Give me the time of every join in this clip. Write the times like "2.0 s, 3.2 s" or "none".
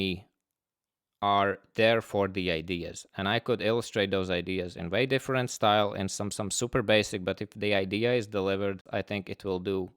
8.8 s